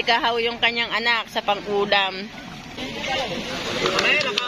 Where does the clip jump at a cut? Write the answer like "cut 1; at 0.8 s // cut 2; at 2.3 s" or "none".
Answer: cut 1; at 2.8 s